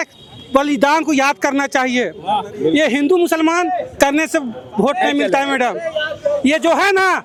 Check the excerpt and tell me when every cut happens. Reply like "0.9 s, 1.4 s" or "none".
none